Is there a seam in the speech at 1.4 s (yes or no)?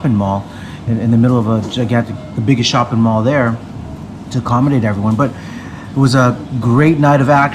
no